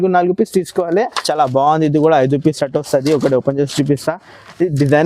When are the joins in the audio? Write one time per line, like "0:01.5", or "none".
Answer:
0:01.2